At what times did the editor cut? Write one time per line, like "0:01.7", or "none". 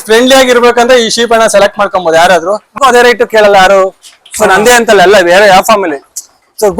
0:02.8